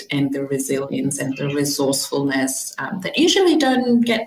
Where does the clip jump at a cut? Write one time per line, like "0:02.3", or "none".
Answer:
none